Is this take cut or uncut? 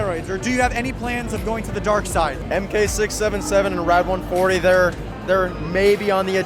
uncut